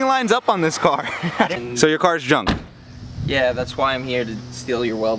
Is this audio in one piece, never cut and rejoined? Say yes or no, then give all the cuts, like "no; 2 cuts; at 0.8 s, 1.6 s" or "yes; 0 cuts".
no; 1 cut; at 1.5 s